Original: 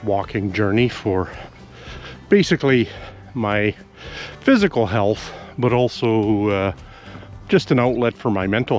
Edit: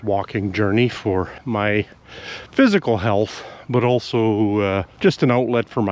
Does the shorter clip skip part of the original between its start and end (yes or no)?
yes